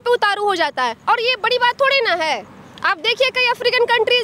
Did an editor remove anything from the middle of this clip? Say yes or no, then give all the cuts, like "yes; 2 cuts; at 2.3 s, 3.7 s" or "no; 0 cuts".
no; 0 cuts